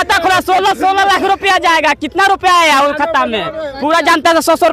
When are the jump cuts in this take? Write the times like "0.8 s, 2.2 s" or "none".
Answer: none